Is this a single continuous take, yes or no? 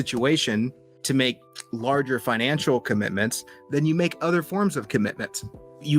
yes